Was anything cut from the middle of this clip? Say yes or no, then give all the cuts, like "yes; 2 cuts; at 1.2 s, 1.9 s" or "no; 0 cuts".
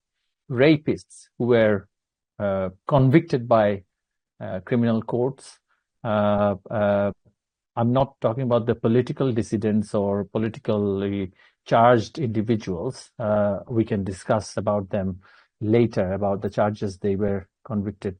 no; 0 cuts